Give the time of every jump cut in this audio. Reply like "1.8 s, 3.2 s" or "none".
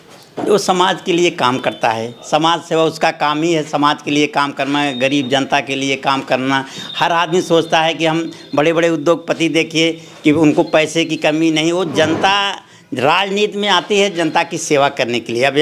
none